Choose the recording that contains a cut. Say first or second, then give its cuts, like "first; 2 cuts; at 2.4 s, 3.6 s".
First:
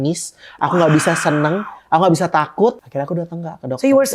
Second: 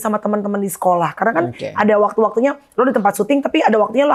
first; 1 cut; at 2.8 s